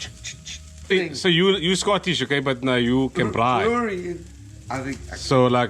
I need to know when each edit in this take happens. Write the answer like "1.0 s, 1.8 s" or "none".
0.9 s